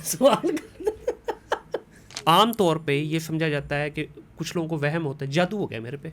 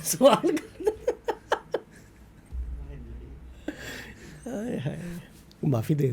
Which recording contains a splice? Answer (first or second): first